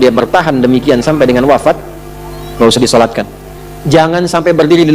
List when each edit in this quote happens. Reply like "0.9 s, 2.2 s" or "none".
3.8 s